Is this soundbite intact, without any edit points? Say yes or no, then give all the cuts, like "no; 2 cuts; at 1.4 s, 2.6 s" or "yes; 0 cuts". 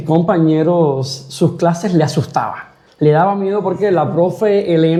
yes; 0 cuts